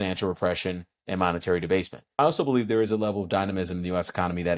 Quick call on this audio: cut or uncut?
cut